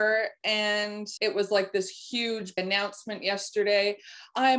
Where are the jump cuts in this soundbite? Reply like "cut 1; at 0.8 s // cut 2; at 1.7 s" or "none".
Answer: cut 1; at 1.0 s // cut 2; at 2.6 s